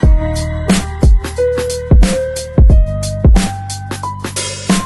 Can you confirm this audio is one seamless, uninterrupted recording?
yes; 0 cuts

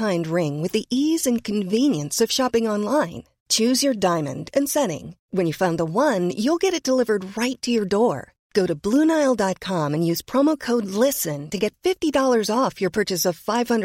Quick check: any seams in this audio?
no; 0 cuts

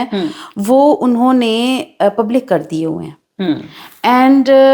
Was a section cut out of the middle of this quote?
no; 0 cuts

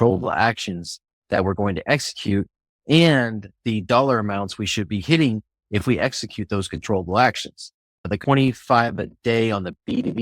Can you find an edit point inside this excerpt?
yes; 1 cut; at 8.2 s

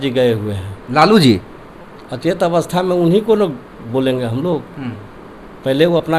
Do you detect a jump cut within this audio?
no; 0 cuts

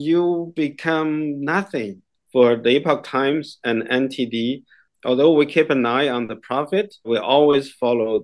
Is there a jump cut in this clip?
yes; 3 cuts; at 2.1 s, 4.8 s, 7.1 s

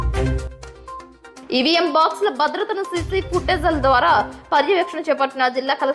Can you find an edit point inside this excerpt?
yes; 1 cut; at 1.2 s

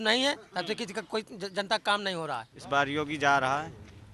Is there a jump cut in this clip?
yes; 1 cut; at 2.5 s

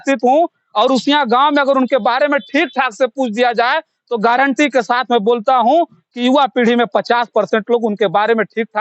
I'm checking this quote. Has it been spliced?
no; 0 cuts

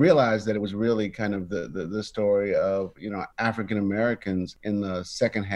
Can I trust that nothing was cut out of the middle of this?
yes; 0 cuts

